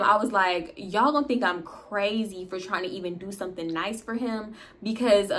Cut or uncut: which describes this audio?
uncut